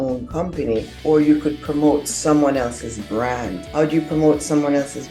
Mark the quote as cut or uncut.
uncut